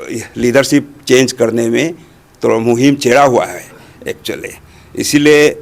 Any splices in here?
no; 0 cuts

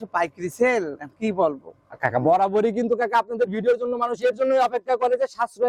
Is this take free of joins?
yes; 0 cuts

